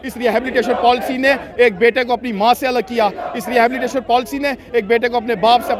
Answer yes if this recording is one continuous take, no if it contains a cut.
yes